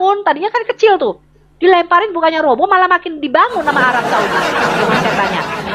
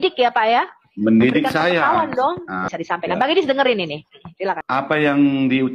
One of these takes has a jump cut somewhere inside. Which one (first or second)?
second